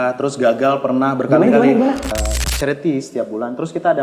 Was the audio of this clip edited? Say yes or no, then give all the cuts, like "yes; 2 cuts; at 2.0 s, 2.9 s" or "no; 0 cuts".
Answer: yes; 1 cut; at 2.2 s